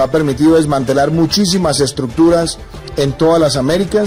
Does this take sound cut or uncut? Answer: uncut